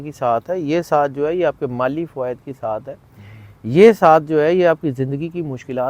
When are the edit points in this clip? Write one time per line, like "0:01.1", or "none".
none